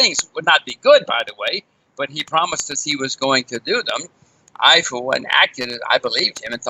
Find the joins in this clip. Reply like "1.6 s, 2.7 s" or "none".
none